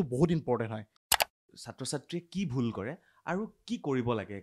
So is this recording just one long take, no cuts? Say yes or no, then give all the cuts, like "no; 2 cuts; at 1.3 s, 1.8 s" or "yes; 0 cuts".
no; 1 cut; at 1.1 s